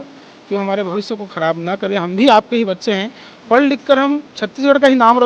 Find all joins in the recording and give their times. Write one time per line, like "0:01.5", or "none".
none